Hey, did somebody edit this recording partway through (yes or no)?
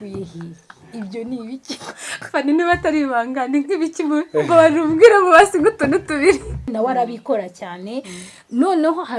yes